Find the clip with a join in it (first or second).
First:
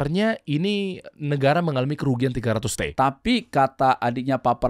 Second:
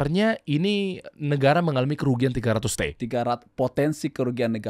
first